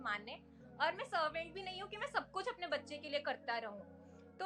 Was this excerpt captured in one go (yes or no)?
yes